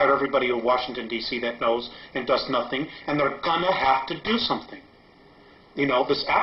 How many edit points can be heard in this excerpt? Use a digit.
1